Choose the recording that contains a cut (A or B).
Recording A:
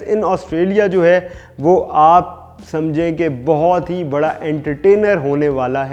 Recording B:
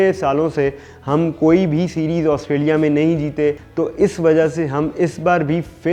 B